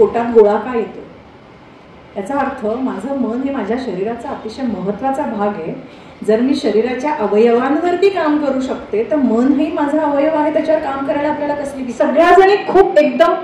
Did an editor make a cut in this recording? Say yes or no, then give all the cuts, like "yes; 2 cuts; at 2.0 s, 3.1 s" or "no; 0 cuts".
yes; 1 cut; at 11.8 s